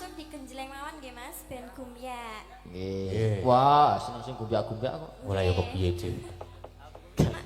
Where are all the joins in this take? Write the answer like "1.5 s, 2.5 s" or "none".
none